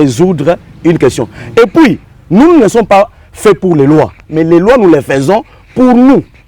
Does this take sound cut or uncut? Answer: cut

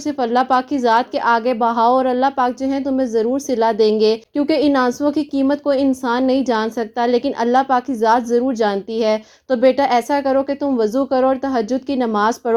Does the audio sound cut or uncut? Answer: uncut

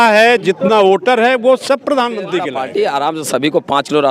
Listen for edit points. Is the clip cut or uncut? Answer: cut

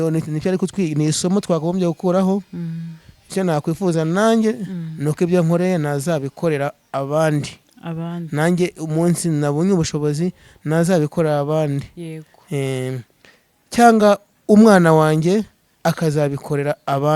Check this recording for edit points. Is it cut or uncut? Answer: uncut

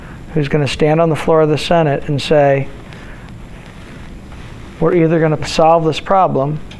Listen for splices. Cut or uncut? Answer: cut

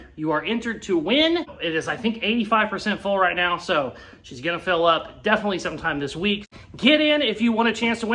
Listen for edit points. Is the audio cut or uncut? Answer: cut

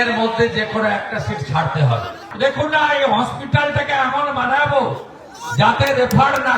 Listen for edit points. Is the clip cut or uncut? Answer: cut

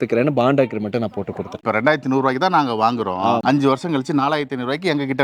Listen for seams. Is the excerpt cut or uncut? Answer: cut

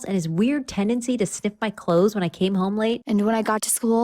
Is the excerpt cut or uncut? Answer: cut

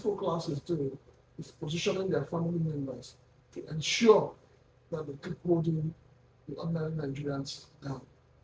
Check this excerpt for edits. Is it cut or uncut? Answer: uncut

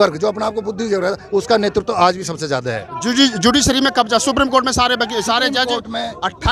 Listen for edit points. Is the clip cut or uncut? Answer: uncut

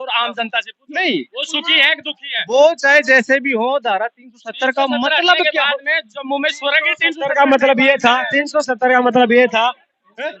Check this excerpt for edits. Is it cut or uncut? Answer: uncut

